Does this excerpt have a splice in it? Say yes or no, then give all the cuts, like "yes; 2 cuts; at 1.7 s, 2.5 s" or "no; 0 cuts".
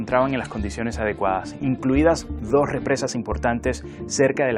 no; 0 cuts